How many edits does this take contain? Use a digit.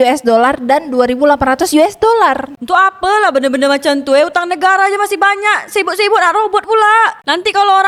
0